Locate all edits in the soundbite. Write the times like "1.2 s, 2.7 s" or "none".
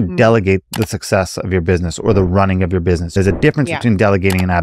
3.1 s